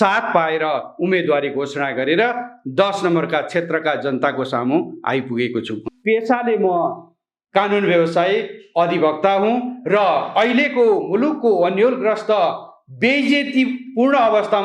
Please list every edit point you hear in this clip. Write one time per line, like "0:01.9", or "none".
0:05.9